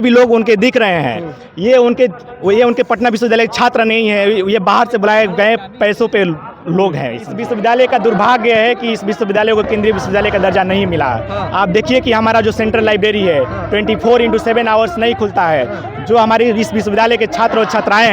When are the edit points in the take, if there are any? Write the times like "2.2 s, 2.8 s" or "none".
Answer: 7.3 s

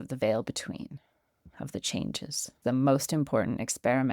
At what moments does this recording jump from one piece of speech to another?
2.6 s

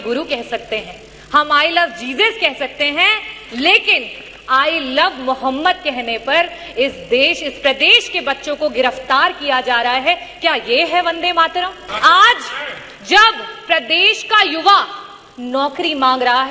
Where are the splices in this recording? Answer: 11.8 s

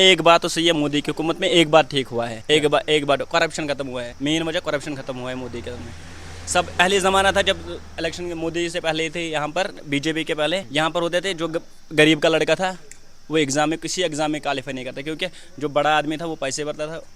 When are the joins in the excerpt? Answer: 2.4 s, 4.1 s, 6.8 s, 10.7 s

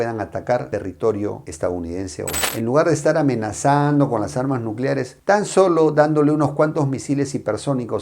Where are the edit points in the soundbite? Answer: 2.4 s

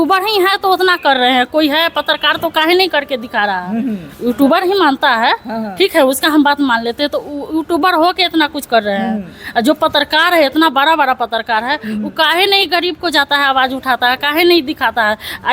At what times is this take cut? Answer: none

